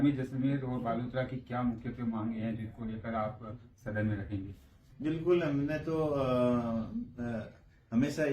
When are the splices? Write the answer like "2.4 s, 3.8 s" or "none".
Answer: 4.9 s